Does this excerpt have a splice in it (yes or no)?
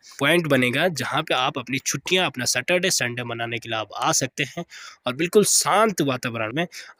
no